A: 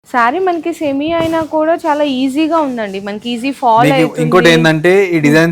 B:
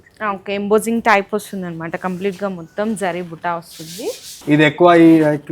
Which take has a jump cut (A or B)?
B